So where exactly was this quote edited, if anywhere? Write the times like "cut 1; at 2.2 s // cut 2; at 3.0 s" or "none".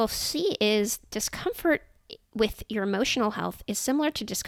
none

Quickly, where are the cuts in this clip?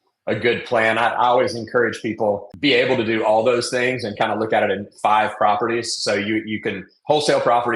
cut 1; at 2.5 s

